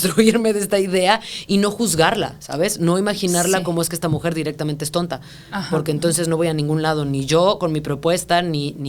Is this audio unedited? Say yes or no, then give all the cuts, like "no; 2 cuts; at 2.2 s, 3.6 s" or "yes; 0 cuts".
yes; 0 cuts